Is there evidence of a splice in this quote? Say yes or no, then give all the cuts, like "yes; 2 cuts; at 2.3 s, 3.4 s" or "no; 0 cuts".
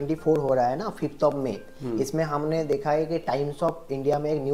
no; 0 cuts